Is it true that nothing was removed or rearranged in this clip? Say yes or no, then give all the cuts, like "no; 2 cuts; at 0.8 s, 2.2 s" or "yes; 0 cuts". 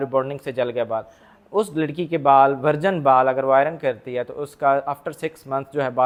yes; 0 cuts